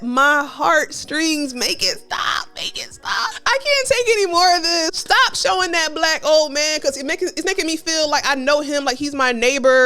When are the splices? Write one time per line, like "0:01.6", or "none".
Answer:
0:03.4
0:04.9